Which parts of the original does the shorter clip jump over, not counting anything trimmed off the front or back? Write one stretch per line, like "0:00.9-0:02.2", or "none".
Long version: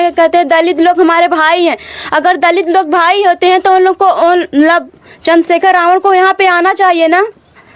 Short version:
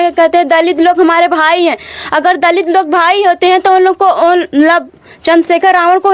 none